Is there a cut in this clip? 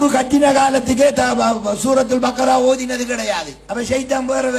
yes; 1 cut; at 3.6 s

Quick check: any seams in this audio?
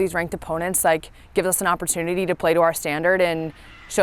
no; 0 cuts

